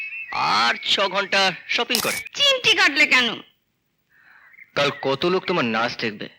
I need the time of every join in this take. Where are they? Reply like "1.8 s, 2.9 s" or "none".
2.3 s